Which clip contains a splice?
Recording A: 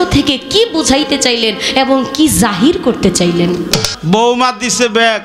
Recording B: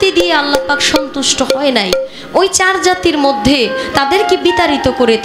A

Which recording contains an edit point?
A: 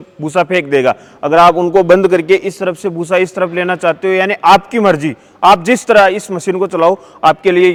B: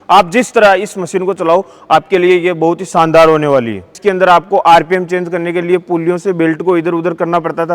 B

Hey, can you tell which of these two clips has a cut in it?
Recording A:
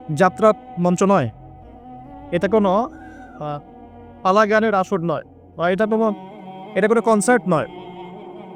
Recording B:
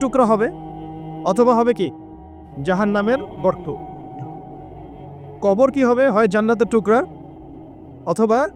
B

